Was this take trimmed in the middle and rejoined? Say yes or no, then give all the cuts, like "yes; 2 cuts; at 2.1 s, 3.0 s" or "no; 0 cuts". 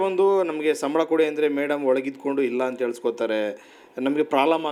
no; 0 cuts